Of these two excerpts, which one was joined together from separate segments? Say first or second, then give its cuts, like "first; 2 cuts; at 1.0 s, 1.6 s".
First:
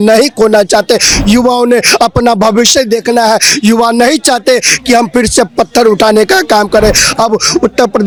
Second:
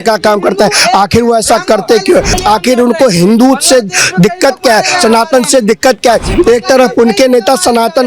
second; 1 cut; at 2.3 s